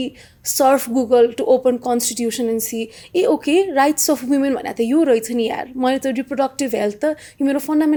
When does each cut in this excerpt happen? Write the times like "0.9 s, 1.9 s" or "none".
none